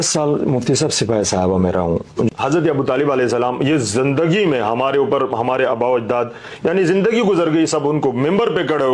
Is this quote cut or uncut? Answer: cut